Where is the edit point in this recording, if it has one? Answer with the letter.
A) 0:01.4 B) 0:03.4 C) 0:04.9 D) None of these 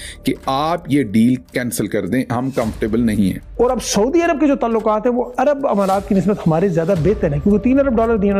B